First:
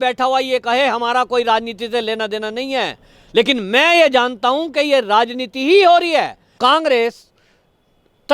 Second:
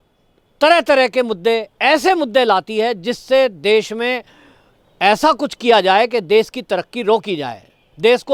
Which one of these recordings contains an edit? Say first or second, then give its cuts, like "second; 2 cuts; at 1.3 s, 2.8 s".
first; 1 cut; at 6.4 s